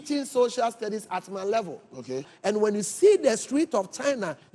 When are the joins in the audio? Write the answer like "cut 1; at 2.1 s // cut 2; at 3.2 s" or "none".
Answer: cut 1; at 2.3 s